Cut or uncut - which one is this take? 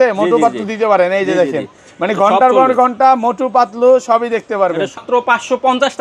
cut